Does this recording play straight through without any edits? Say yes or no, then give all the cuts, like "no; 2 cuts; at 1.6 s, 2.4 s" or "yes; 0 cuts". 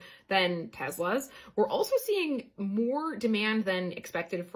yes; 0 cuts